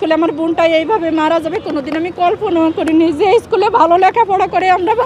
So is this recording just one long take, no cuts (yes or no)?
yes